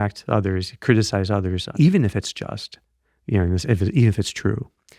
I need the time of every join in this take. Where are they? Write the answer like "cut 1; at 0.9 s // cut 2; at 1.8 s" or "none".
cut 1; at 1.6 s